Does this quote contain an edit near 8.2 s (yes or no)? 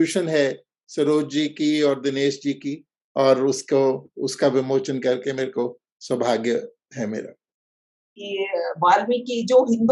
yes